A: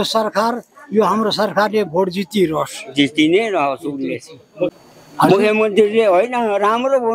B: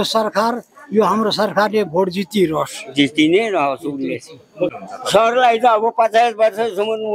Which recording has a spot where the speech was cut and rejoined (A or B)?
B